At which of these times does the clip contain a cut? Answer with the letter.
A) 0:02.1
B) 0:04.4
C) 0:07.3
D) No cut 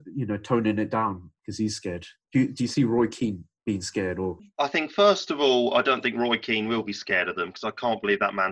B